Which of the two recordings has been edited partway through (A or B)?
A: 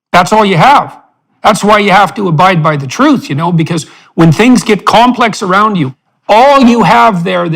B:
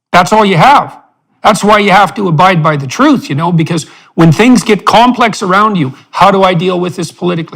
A